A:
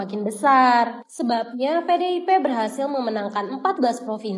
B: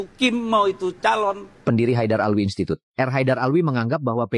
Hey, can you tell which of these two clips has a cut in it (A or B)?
B